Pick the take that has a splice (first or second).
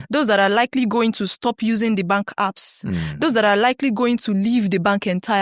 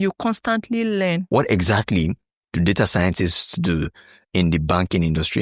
second